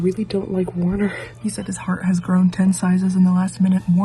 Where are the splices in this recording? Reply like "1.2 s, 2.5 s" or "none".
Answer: 1.2 s